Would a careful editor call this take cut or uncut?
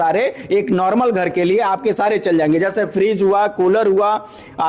uncut